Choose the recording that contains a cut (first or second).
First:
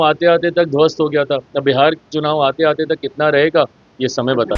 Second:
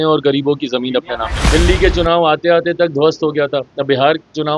second